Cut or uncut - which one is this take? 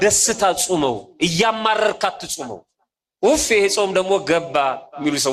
uncut